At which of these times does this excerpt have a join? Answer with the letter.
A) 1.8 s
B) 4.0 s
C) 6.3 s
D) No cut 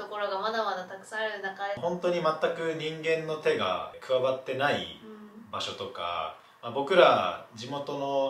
A